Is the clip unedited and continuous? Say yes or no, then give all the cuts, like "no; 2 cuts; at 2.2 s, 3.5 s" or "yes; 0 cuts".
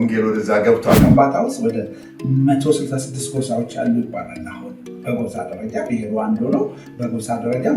no; 1 cut; at 1.0 s